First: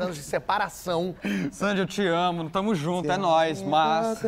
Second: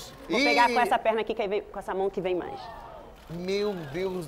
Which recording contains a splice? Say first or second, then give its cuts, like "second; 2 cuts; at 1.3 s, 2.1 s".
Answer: first; 1 cut; at 1.2 s